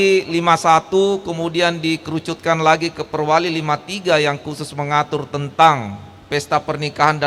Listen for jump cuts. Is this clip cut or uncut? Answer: uncut